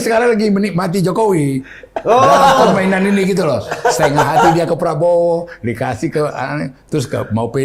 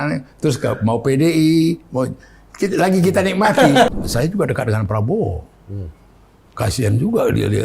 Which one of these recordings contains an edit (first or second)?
second